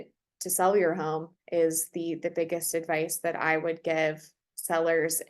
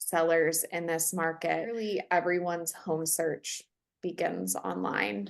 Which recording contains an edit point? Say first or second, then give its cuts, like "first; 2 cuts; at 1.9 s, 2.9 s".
second; 1 cut; at 1.8 s